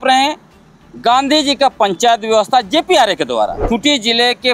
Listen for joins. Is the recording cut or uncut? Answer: cut